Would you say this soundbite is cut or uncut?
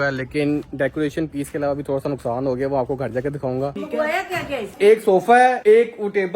cut